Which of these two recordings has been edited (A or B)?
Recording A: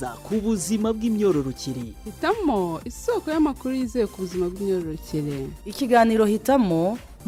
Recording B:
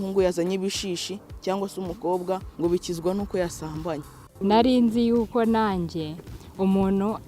B